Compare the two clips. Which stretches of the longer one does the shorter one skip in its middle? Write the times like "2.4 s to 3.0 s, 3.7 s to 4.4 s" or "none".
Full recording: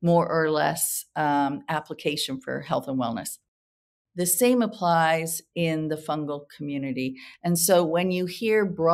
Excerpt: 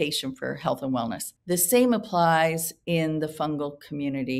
3.3 s to 4.0 s